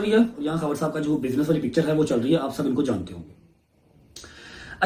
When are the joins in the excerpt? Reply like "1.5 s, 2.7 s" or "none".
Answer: none